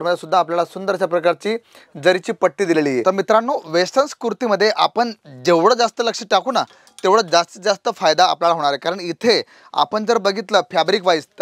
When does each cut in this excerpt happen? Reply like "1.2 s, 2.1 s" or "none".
3.0 s